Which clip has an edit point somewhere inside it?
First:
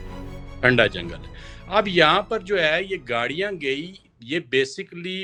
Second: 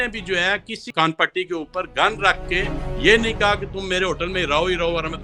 second; 1 cut; at 0.9 s

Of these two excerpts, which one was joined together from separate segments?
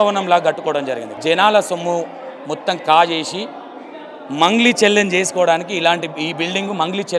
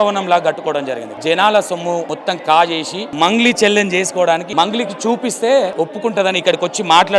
second; 4 cuts; at 2.1 s, 3.0 s, 4.5 s, 5.7 s

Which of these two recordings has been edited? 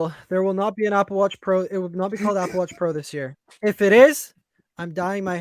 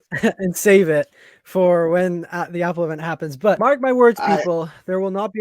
second; 1 cut; at 3.6 s

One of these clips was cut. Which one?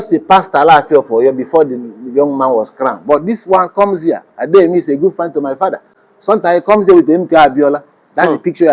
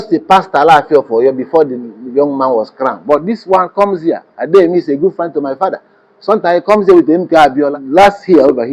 second; 1 cut; at 7.8 s

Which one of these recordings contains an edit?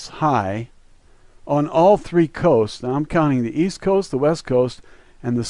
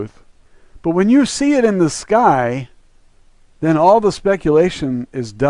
first; 1 cut; at 3.1 s

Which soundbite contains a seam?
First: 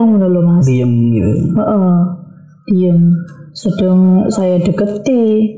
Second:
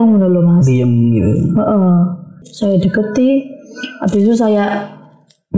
second; 1 cut; at 2.4 s

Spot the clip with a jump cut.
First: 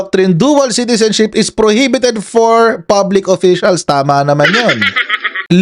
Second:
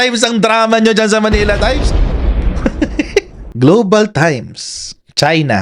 second; 1 cut; at 3.4 s

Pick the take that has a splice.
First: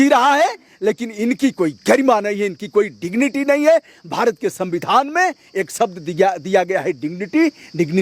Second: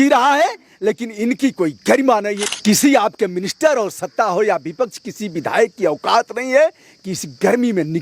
second; 1 cut; at 2.5 s

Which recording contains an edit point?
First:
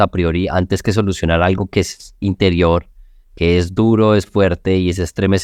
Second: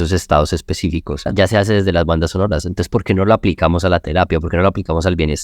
second; 1 cut; at 1.3 s

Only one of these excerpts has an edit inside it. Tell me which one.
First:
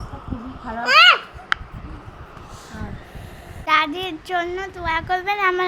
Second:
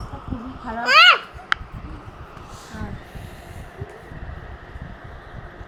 first; 1 cut; at 3.5 s

